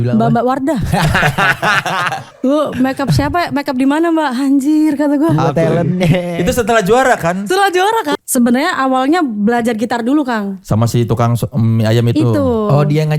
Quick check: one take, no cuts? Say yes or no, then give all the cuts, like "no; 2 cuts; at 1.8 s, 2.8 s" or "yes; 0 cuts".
no; 2 cuts; at 2.3 s, 8.1 s